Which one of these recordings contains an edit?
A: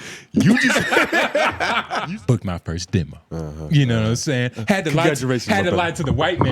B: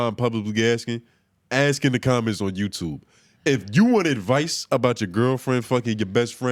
A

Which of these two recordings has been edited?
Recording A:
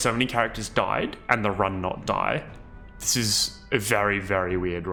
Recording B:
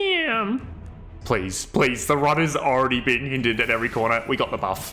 B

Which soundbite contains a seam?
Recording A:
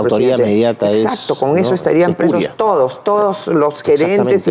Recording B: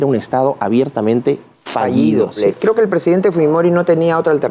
B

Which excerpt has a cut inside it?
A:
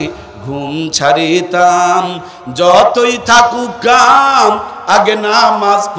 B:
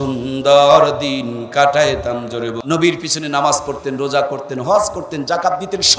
B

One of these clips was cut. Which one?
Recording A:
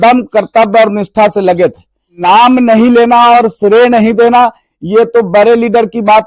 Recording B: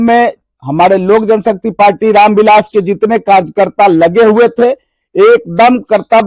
A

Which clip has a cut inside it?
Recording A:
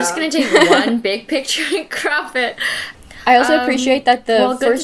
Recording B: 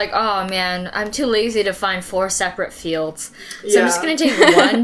A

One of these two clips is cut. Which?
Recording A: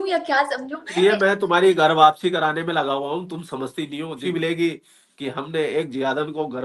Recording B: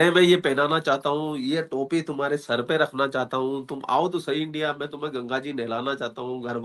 A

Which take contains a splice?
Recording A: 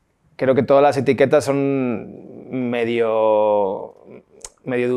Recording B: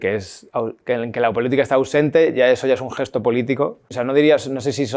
B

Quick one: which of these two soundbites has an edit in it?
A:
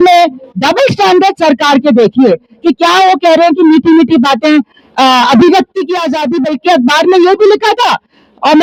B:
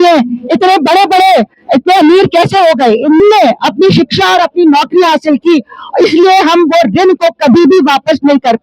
B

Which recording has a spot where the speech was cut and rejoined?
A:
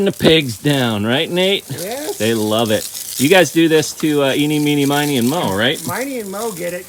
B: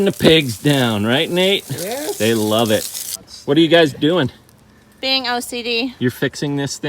B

